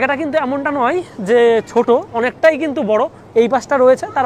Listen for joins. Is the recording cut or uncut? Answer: uncut